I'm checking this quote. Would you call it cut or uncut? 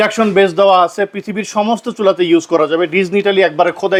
uncut